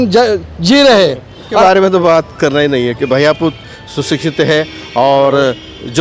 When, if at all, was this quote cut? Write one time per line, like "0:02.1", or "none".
0:01.6